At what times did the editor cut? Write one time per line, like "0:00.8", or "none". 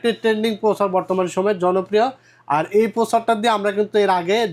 none